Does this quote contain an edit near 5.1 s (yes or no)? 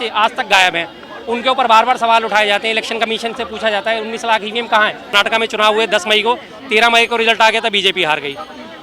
yes